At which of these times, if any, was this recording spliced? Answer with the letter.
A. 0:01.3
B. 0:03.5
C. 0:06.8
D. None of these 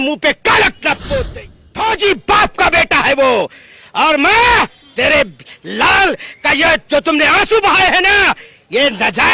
A